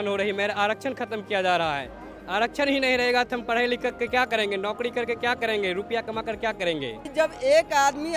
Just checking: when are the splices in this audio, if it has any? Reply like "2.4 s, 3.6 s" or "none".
7.0 s